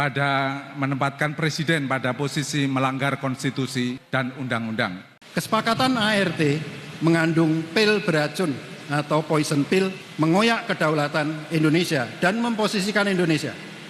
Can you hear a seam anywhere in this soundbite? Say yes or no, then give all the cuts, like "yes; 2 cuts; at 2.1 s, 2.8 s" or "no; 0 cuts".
yes; 1 cut; at 5.1 s